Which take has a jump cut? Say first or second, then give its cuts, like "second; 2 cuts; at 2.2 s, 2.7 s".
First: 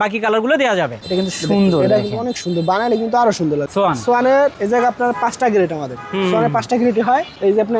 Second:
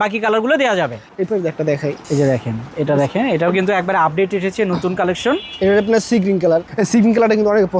first; 2 cuts; at 1.0 s, 3.7 s